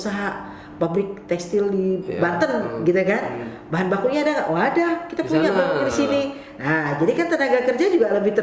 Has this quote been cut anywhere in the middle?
no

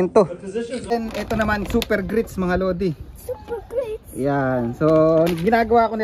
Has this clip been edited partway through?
yes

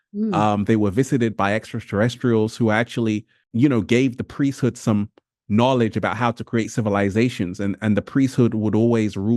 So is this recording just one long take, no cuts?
yes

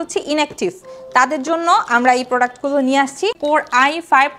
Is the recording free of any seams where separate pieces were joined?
no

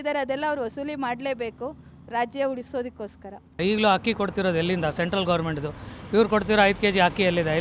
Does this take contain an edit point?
yes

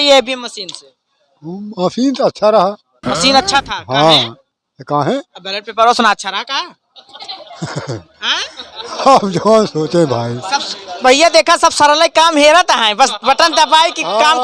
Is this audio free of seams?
yes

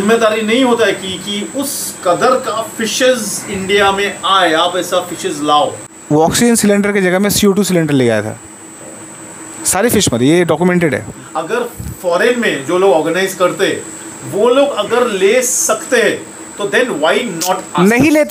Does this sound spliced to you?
yes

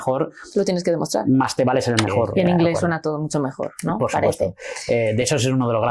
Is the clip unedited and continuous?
no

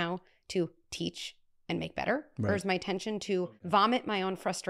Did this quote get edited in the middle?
yes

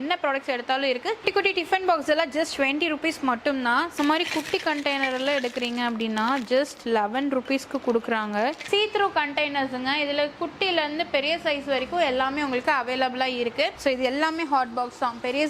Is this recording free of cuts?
no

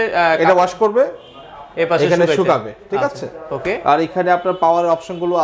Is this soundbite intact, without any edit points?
yes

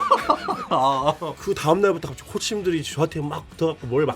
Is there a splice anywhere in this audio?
yes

